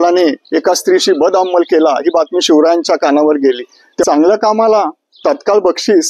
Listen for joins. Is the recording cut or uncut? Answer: cut